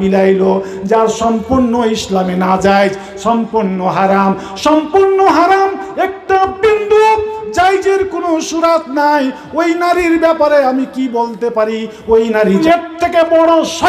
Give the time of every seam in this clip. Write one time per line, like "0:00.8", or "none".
0:12.6